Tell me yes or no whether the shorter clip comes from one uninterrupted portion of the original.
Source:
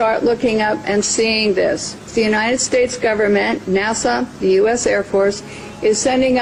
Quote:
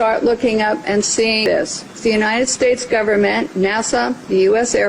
no